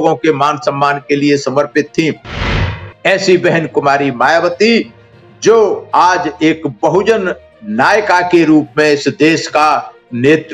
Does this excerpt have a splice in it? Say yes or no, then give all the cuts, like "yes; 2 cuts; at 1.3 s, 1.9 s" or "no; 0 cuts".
yes; 1 cut; at 2.4 s